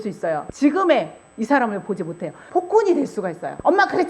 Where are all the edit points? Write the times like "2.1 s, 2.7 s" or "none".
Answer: 2.4 s